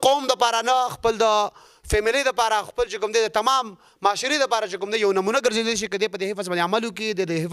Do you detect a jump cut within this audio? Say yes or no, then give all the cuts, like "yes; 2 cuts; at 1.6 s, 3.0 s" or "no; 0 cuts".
no; 0 cuts